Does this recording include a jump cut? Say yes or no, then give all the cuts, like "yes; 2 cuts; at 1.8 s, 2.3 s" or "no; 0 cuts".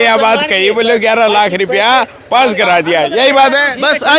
no; 0 cuts